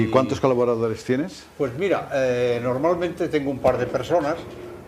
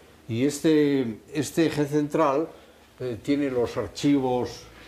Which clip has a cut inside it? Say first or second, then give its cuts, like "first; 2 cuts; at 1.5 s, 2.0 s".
first; 1 cut; at 2.0 s